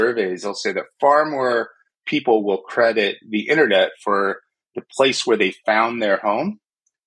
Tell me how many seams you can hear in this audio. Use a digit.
0